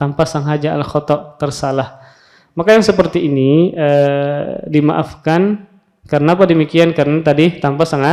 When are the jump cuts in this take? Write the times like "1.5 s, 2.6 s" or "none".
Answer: none